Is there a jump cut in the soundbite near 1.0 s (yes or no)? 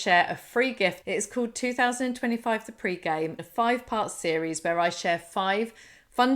yes